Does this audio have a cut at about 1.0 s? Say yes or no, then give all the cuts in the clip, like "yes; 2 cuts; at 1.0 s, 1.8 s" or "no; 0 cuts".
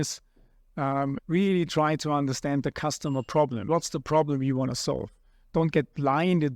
yes; 1 cut; at 1.0 s